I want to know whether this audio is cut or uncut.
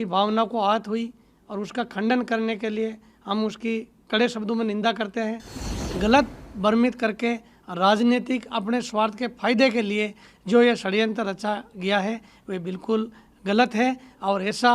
cut